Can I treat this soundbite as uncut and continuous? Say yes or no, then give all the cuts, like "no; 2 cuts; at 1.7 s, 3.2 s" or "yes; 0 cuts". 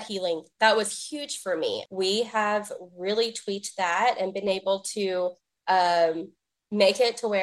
no; 1 cut; at 1.8 s